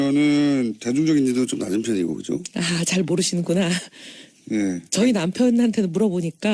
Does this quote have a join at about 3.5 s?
yes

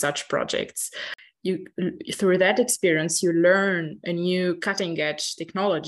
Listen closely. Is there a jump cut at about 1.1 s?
yes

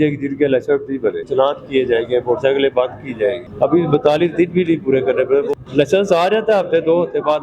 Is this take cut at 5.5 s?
yes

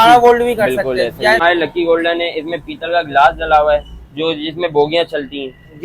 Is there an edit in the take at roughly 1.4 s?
yes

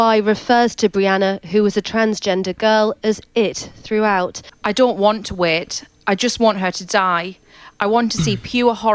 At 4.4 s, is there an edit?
yes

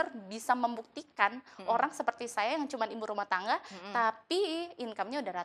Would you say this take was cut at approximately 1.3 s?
no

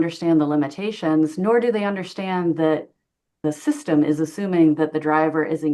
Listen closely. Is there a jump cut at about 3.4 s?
yes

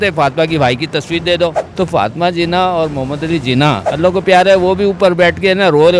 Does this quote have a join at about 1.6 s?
yes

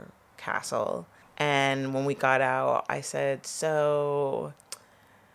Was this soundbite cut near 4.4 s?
no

